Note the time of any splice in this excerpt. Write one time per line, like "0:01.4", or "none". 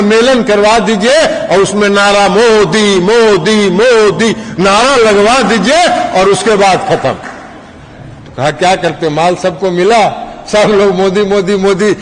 none